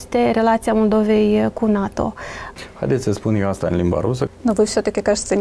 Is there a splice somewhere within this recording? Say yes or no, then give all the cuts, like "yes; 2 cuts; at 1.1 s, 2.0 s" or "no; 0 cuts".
yes; 2 cuts; at 2.4 s, 4.3 s